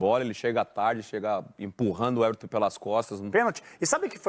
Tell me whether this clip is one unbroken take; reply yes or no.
no